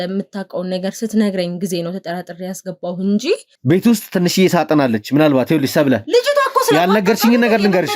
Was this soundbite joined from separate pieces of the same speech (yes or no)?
yes